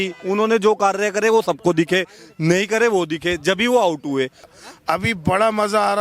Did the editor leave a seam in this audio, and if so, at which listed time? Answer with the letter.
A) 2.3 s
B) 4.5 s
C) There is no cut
B